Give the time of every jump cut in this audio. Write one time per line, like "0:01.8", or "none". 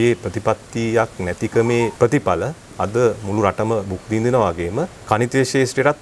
0:01.9
0:05.0

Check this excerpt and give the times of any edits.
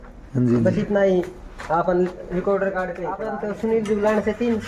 0:03.2

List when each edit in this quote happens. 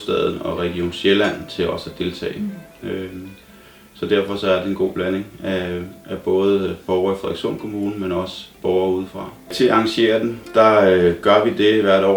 0:09.5

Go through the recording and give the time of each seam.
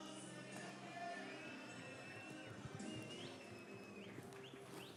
none

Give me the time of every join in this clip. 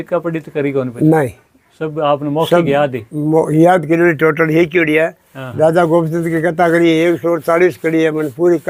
none

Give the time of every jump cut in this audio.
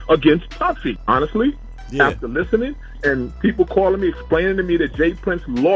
0:00.9

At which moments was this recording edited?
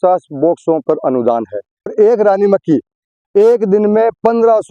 0:01.9

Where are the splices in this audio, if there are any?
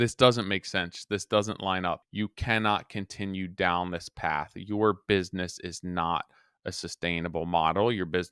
0:02.0

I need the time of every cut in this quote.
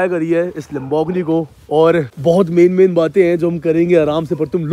0:02.1

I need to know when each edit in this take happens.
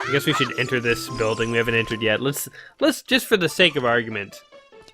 none

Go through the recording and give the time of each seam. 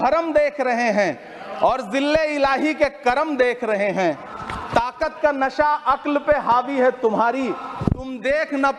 none

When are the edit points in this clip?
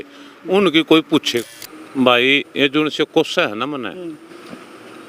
0:01.3

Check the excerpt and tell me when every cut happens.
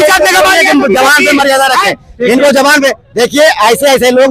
none

